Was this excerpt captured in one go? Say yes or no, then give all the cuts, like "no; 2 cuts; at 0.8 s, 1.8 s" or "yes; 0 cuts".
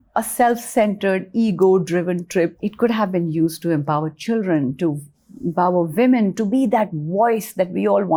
yes; 0 cuts